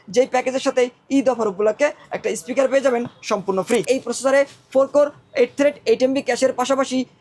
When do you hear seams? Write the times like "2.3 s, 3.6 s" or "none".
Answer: 3.8 s